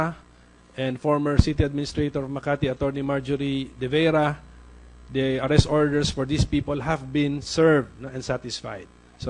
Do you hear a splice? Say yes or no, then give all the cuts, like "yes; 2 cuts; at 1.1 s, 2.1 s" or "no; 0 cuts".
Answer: yes; 1 cut; at 3.8 s